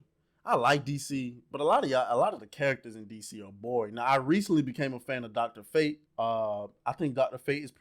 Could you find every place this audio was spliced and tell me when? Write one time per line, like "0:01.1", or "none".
0:06.0